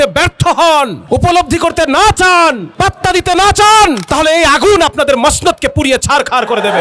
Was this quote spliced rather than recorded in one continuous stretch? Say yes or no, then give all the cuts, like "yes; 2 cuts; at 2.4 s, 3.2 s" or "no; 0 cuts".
yes; 3 cuts; at 1.0 s, 2.7 s, 4.0 s